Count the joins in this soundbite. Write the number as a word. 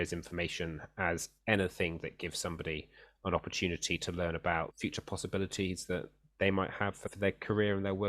two